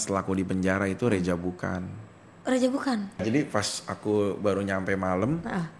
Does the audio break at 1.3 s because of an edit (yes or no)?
no